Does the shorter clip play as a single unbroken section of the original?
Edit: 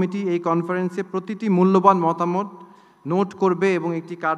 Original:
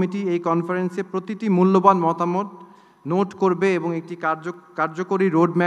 yes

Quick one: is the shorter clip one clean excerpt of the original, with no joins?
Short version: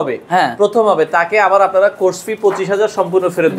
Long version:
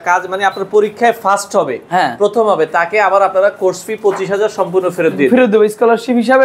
yes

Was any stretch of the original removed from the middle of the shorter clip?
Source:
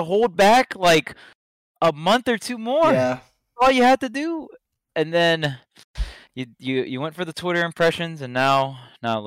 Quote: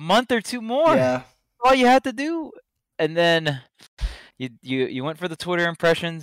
no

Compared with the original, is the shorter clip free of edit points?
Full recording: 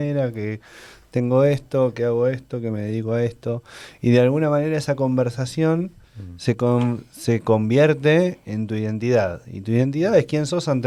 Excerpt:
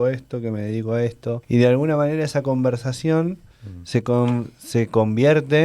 no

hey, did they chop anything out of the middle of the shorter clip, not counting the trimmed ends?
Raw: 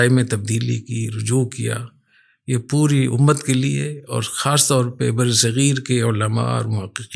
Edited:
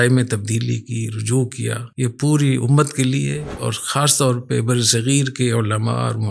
yes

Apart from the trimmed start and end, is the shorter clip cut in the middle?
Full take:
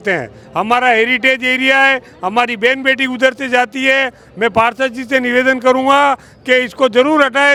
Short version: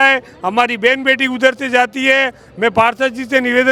no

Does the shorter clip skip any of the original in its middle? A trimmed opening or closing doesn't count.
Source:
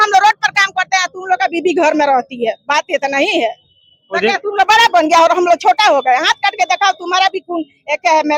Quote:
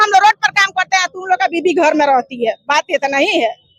no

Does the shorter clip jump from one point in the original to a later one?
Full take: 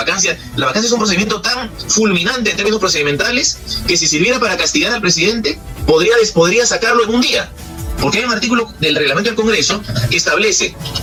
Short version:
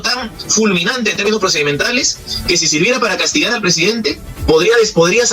no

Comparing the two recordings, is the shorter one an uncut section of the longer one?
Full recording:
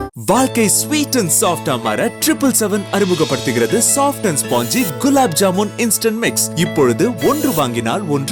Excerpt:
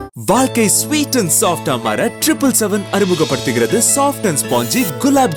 yes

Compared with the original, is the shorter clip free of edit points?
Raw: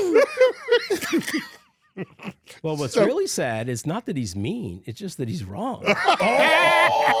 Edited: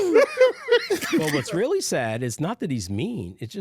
no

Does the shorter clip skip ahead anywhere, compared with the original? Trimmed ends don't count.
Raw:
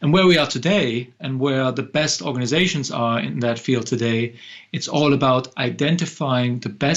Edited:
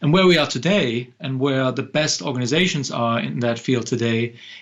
no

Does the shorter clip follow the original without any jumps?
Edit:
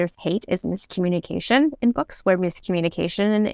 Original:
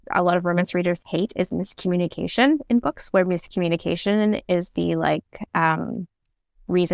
yes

